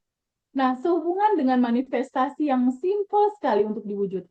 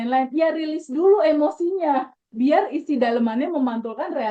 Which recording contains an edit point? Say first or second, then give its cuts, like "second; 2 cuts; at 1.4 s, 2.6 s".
second; 1 cut; at 2.2 s